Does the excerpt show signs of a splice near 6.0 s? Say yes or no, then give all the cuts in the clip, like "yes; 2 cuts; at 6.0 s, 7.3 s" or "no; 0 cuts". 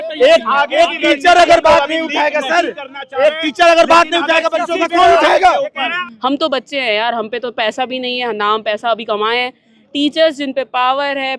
yes; 1 cut; at 6.0 s